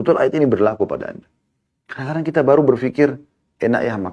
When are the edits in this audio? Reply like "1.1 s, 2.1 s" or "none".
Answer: none